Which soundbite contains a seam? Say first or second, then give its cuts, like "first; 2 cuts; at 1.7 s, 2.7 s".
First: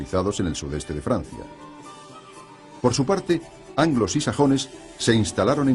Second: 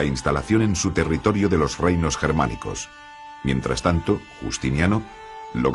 first; 1 cut; at 1.5 s